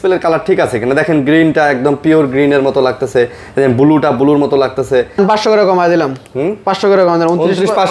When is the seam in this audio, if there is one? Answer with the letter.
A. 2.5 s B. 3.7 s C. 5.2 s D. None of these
C